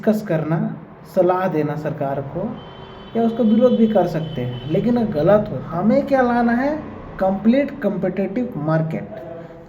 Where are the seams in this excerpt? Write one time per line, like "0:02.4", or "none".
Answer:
0:05.6